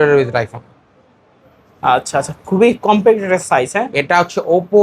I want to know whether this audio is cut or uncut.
uncut